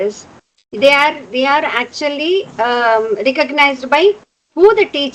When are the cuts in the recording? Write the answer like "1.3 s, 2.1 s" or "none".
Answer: none